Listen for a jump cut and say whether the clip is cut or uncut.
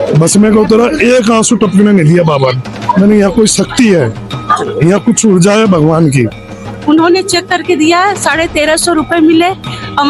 cut